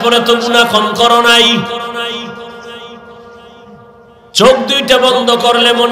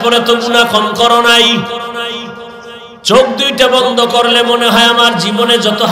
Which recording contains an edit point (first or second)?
second